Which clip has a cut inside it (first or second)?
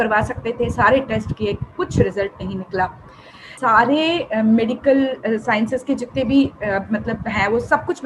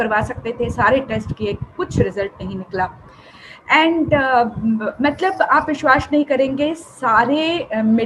first